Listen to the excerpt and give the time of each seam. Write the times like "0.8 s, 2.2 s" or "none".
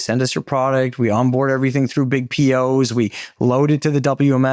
none